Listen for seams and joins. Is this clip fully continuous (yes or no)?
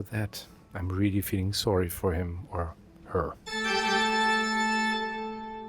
no